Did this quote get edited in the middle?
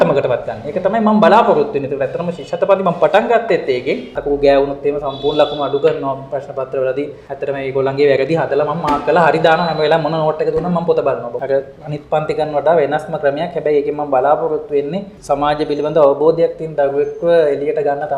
yes; 4 cuts; at 4.1 s, 7.2 s, 11.3 s, 15.1 s

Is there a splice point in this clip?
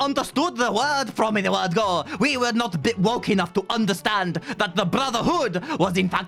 no; 0 cuts

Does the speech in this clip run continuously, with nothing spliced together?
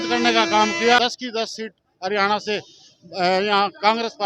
no; 1 cut; at 1.2 s

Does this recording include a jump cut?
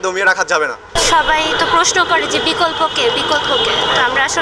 no; 0 cuts

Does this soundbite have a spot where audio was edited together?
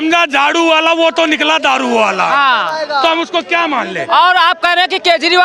no; 0 cuts

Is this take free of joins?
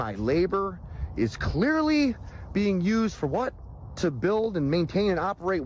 yes; 0 cuts

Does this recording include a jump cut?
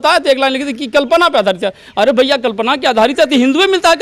no; 0 cuts

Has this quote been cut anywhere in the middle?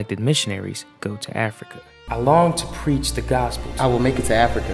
yes; 2 cuts; at 1.9 s, 3.6 s

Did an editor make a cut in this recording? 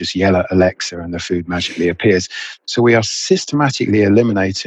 yes; 1 cut; at 2.4 s

